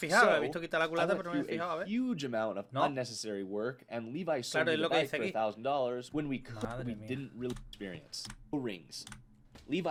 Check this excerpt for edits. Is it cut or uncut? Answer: uncut